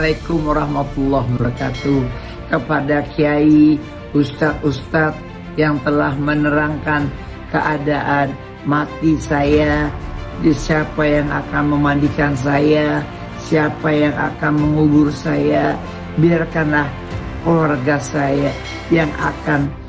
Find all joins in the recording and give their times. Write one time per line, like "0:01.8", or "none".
none